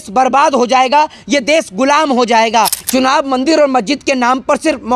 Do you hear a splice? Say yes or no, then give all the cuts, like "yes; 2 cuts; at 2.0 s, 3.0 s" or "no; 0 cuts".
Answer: yes; 1 cut; at 2.8 s